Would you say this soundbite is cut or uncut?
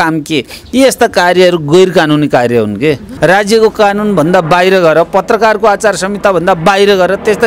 cut